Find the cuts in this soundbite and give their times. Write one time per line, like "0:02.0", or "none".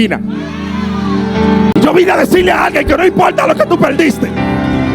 0:01.7